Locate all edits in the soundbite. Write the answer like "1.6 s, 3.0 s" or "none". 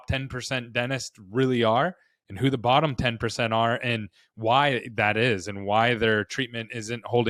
none

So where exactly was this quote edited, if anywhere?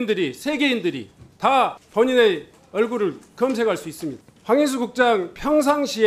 1.8 s, 4.3 s

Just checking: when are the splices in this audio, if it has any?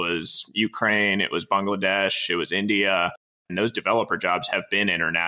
3.5 s

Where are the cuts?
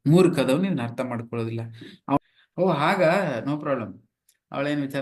2.2 s

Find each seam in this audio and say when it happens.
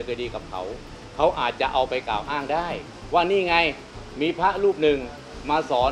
2.9 s

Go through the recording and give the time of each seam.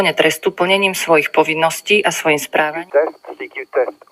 2.7 s

